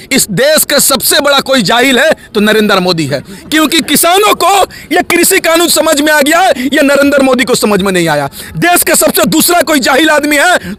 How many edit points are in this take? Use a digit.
0